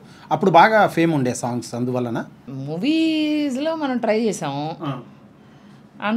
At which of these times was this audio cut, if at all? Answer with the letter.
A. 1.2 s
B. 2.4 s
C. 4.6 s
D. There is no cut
D